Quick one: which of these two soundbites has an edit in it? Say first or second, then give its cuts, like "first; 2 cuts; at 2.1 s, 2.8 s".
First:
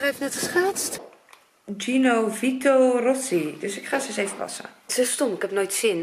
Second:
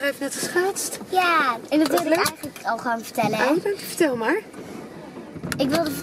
first; 2 cuts; at 1.0 s, 4.9 s